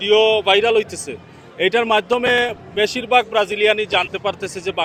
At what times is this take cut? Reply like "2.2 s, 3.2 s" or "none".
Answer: none

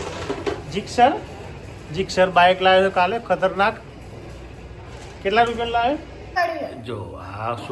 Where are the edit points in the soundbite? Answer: 6.2 s

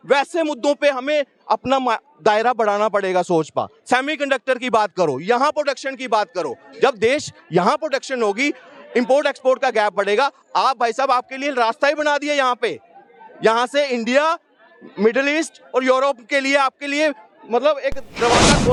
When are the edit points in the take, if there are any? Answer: none

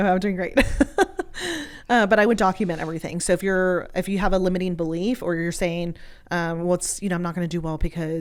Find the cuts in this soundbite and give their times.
none

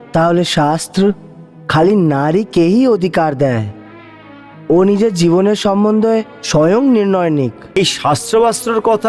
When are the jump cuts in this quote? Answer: 7.8 s

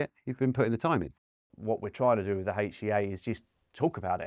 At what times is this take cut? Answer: 1.3 s

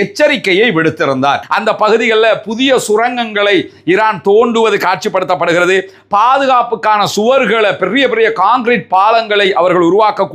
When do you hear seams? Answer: 1.4 s

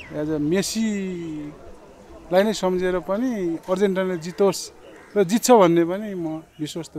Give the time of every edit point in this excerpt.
none

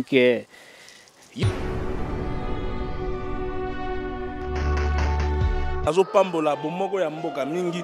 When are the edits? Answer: 1.2 s, 5.8 s

